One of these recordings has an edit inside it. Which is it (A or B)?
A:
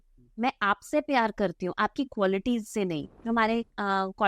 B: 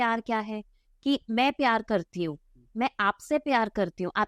A